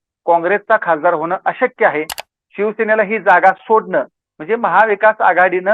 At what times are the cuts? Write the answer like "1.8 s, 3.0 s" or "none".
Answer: 2.2 s